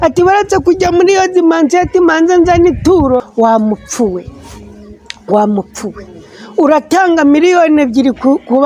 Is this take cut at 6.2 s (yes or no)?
no